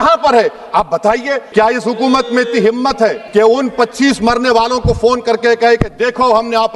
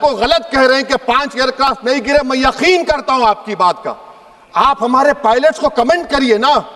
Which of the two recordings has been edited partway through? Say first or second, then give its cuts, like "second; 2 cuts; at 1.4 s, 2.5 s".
first; 2 cuts; at 1.4 s, 3.2 s